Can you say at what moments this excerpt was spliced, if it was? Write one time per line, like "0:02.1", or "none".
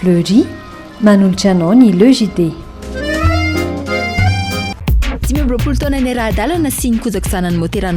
0:04.7